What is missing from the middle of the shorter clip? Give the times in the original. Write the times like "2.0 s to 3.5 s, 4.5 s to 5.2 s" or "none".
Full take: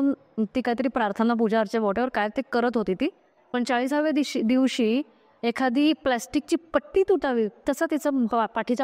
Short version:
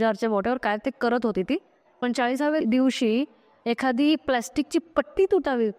4.1 s to 4.4 s